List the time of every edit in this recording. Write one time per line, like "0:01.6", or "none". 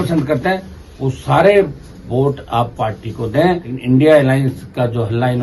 0:03.7